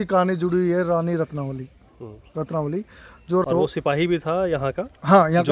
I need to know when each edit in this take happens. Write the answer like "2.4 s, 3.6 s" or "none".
3.6 s